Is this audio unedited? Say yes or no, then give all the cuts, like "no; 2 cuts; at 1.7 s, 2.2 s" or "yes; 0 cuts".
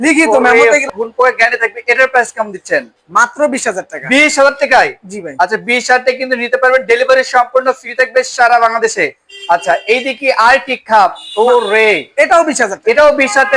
yes; 0 cuts